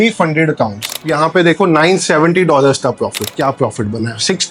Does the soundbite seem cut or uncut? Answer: cut